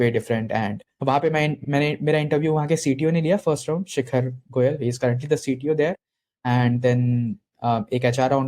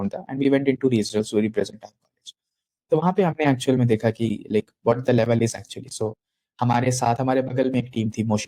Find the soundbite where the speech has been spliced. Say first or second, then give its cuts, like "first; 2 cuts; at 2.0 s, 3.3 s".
first; 1 cut; at 1.6 s